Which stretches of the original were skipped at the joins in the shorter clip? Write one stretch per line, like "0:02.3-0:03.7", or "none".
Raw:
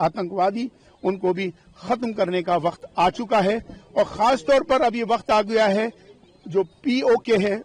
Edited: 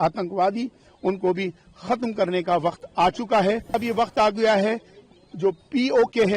0:03.8-0:04.9